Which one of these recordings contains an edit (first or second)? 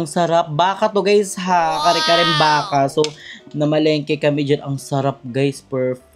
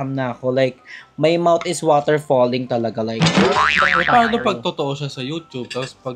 second